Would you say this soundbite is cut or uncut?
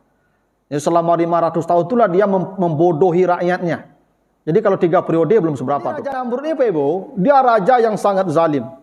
cut